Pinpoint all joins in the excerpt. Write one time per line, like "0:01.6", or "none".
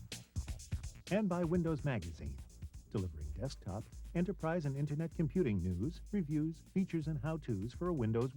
0:01.0

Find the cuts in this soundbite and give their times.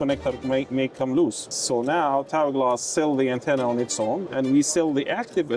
0:01.6
0:04.3

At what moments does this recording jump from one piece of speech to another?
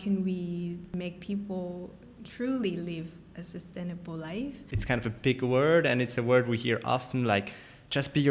0:00.9
0:04.7

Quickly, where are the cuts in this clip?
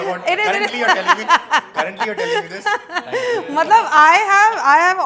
none

